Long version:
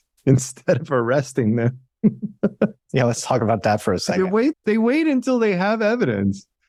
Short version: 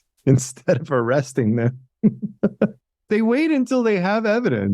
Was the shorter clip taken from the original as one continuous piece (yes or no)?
no